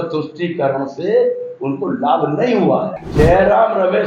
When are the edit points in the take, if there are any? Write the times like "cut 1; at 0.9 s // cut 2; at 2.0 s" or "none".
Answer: cut 1; at 3.0 s